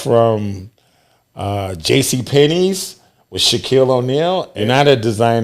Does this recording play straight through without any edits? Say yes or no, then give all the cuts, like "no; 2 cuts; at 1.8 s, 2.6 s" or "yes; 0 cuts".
no; 1 cut; at 4.5 s